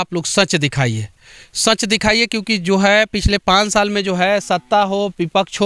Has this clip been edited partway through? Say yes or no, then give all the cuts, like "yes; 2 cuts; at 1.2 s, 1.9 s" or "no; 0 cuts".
no; 0 cuts